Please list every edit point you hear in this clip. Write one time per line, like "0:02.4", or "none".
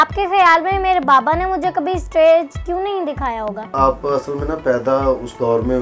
0:03.7